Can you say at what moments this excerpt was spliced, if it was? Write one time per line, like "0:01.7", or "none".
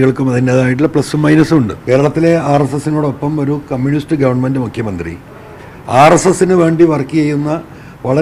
0:01.8